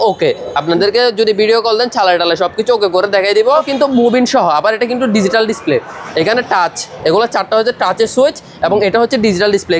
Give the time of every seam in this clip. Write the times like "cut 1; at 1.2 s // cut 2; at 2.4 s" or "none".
cut 1; at 3.7 s